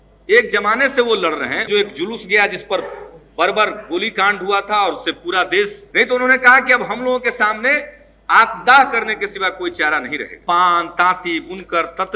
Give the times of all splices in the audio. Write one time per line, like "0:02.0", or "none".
0:01.7
0:05.8
0:10.4